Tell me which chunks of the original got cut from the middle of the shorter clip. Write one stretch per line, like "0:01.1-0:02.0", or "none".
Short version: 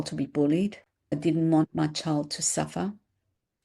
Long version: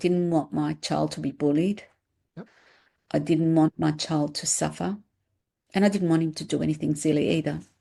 0:02.2-0:03.2